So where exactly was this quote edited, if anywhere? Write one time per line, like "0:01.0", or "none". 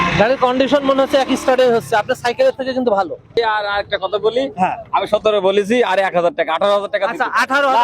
0:03.2